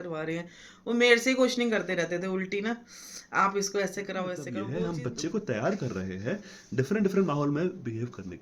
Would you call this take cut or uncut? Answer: cut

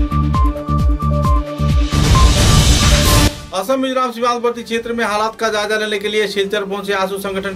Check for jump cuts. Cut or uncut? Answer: cut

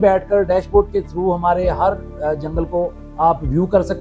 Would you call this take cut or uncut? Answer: uncut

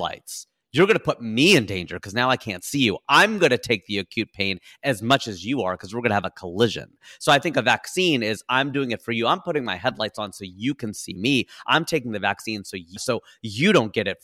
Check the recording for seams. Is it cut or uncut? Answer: uncut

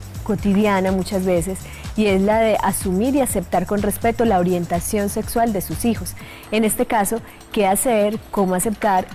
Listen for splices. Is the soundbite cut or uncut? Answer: cut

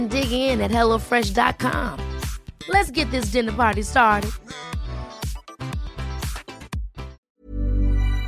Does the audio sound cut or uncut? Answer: cut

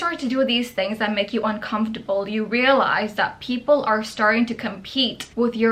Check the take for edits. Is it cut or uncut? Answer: uncut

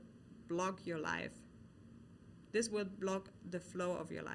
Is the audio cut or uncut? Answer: uncut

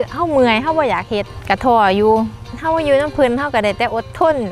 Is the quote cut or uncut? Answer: uncut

